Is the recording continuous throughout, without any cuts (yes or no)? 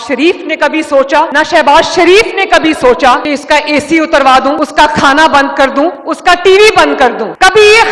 yes